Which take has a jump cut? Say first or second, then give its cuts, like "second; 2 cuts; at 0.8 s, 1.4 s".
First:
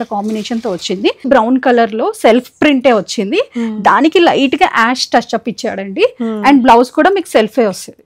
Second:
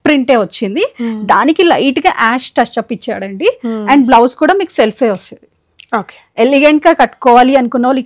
first; 1 cut; at 1.3 s